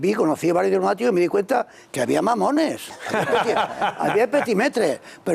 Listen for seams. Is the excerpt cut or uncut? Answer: cut